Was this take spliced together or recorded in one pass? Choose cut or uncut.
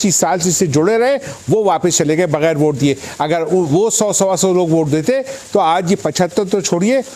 uncut